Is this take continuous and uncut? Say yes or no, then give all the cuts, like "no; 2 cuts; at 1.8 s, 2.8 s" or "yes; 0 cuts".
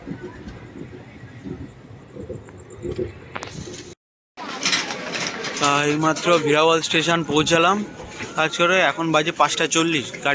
yes; 0 cuts